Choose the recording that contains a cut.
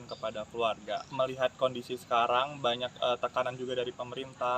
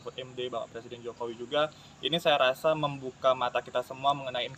first; 1 cut; at 1.1 s

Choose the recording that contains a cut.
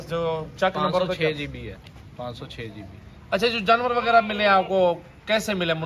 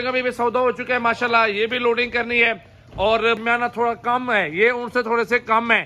second; 1 cut; at 3.4 s

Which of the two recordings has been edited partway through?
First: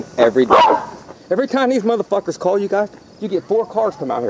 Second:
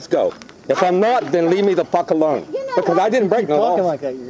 first; 1 cut; at 1.1 s

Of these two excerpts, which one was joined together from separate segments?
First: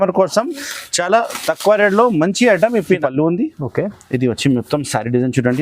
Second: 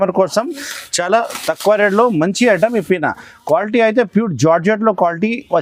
first; 1 cut; at 3.0 s

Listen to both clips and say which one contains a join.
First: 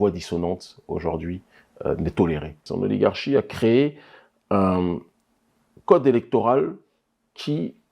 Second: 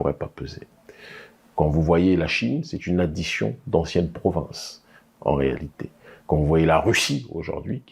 first; 1 cut; at 2.6 s

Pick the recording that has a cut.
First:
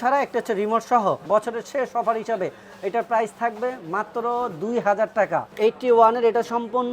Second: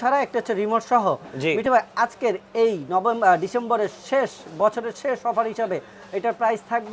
first; 2 cuts; at 1.2 s, 5.5 s

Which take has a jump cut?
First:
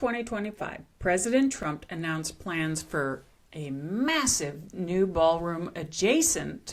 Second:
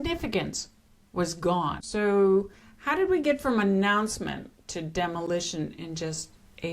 second; 1 cut; at 1.8 s

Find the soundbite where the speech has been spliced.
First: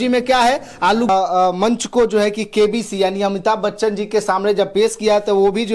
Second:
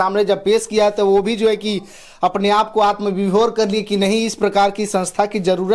first; 1 cut; at 1.1 s

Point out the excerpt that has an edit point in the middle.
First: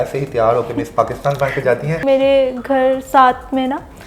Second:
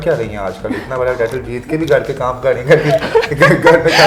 first; 1 cut; at 2.0 s

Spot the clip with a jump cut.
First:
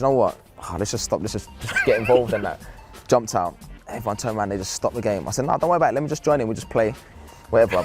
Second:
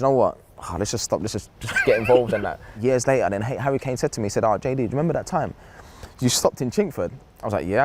second; 1 cut; at 2.7 s

